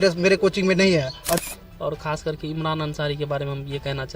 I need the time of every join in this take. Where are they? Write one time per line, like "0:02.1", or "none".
0:01.4